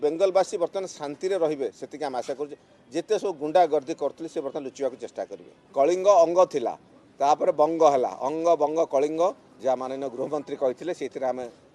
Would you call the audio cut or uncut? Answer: cut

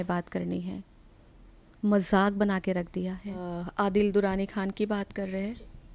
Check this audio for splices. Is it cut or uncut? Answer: cut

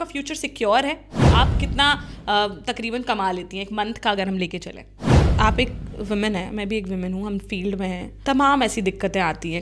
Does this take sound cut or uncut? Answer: cut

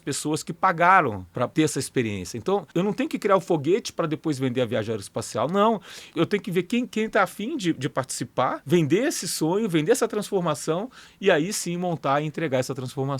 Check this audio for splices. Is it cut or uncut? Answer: cut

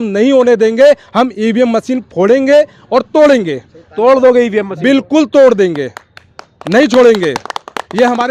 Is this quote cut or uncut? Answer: uncut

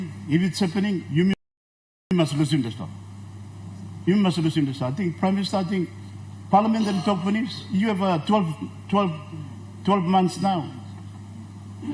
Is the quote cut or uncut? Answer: uncut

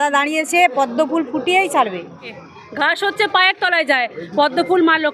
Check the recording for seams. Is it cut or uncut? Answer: cut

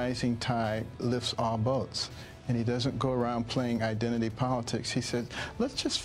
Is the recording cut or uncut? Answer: uncut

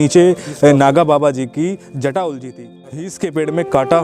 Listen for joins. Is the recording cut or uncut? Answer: cut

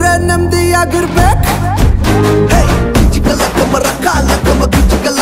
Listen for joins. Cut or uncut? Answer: uncut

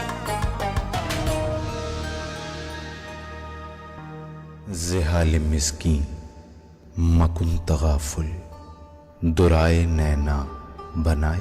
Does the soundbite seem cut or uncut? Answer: cut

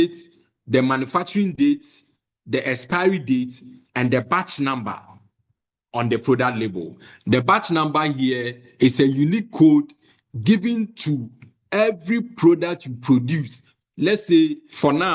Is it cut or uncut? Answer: uncut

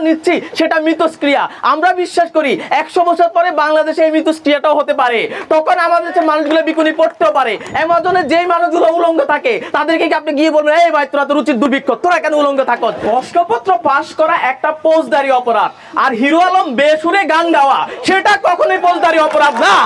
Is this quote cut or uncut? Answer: cut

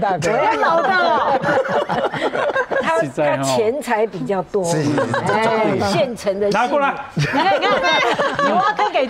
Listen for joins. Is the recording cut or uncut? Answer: uncut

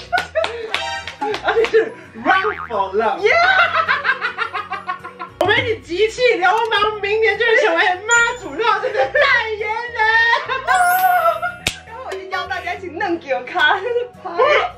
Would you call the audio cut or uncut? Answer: cut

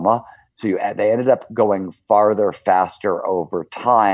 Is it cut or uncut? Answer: uncut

